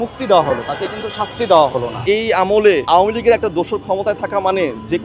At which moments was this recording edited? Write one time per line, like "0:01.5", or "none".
0:01.9
0:02.8